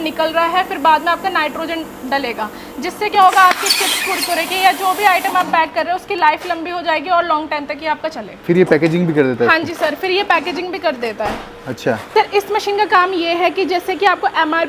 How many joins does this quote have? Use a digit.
2